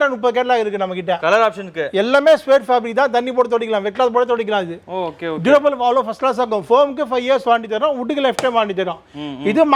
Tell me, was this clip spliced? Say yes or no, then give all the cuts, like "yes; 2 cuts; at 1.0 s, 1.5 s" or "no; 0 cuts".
no; 0 cuts